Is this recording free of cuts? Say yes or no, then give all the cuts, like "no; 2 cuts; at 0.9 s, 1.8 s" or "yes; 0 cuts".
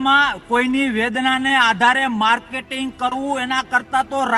yes; 0 cuts